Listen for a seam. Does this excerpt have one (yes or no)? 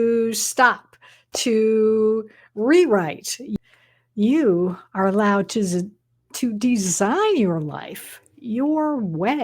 yes